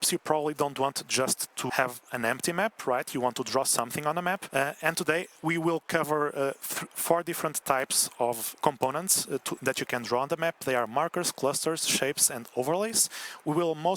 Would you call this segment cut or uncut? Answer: cut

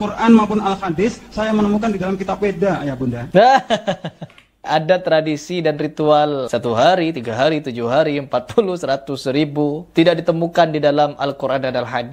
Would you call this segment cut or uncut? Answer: cut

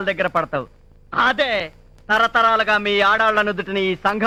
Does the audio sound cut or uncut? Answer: uncut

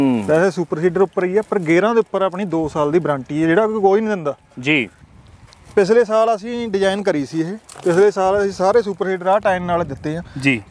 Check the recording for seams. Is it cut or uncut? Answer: cut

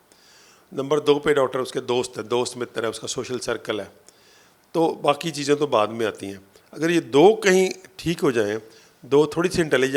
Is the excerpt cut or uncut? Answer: uncut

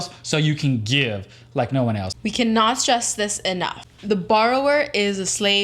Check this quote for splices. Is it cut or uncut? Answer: cut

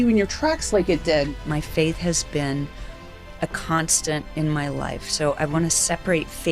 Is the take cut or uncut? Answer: cut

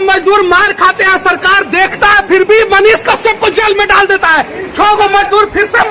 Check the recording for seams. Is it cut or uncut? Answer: uncut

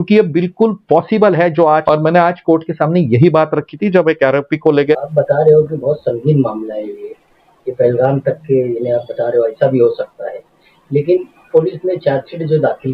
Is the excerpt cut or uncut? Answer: cut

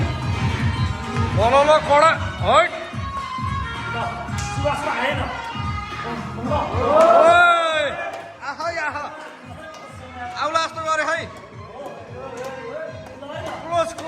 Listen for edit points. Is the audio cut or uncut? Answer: uncut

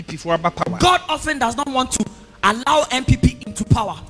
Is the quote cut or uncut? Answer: uncut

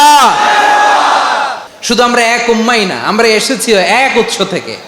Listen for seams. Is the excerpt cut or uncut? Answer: cut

